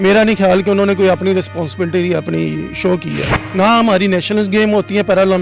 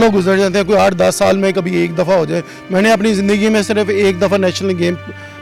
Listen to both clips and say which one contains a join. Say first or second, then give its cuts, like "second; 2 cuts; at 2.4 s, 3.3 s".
first; 1 cut; at 3.4 s